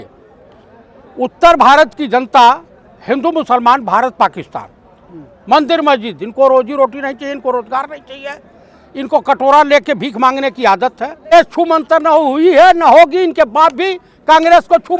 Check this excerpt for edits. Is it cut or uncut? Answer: cut